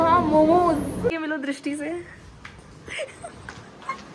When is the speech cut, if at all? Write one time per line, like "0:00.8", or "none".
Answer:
0:01.1